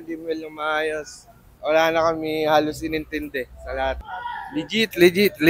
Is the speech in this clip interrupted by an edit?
yes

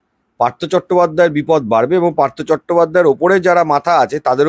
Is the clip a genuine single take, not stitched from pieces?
yes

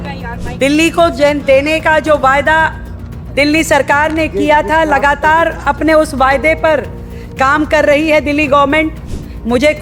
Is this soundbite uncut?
yes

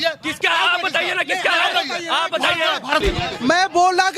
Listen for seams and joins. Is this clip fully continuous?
no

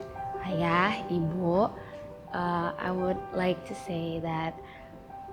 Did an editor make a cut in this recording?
no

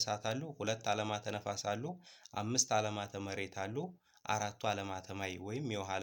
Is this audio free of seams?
yes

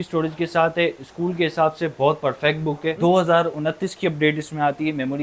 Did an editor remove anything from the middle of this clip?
no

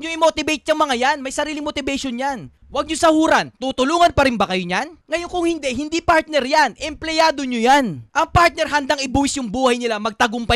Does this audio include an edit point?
no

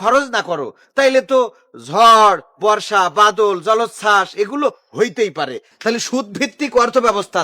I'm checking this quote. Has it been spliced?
yes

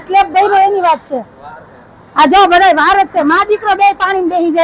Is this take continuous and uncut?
yes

